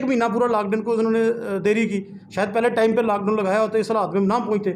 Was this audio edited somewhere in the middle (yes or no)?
no